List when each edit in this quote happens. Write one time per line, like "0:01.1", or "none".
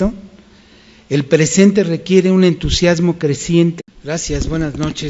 none